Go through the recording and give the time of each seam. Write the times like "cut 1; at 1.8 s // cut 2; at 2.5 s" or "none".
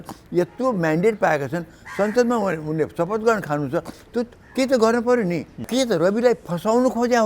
cut 1; at 5.6 s